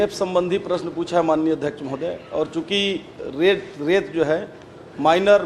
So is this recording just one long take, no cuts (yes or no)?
yes